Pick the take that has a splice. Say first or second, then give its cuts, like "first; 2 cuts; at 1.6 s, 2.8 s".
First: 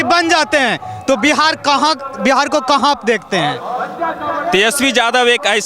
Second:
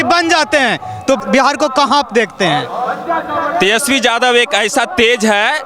second; 1 cut; at 1.2 s